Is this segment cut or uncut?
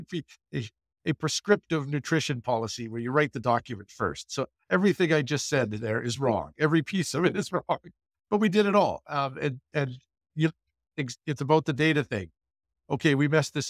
uncut